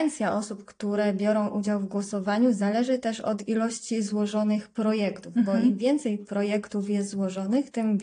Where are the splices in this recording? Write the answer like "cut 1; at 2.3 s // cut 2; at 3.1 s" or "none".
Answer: none